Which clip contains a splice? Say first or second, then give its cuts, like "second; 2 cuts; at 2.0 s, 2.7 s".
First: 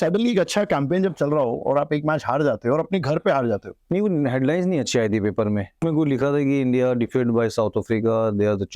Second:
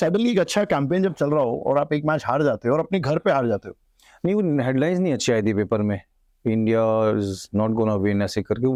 first; 2 cuts; at 3.7 s, 5.8 s